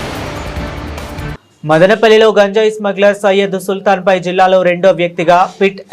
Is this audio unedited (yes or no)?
no